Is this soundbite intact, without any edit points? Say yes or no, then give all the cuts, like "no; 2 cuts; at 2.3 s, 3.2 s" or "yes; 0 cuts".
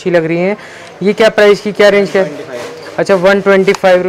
yes; 0 cuts